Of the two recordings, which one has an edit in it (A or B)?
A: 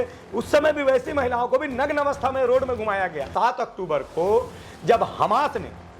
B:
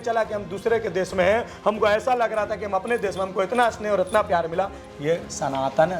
A